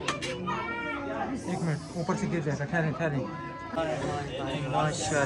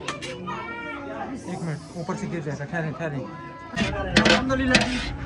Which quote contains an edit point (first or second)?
second